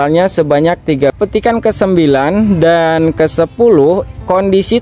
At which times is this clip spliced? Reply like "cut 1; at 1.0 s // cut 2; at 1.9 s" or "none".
cut 1; at 1.1 s

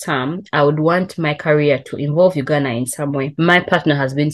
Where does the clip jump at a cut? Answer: cut 1; at 3.3 s

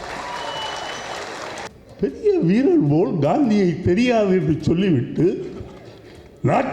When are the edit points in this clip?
cut 1; at 1.7 s

